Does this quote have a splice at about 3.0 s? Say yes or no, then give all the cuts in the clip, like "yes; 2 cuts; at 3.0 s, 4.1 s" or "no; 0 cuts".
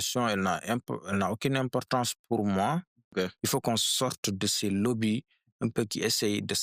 yes; 1 cut; at 3.0 s